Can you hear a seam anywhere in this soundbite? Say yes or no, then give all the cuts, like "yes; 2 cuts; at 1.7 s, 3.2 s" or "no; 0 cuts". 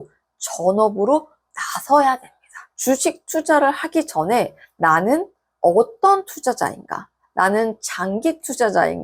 no; 0 cuts